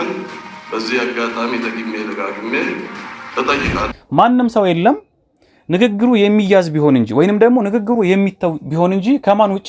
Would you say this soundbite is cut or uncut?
cut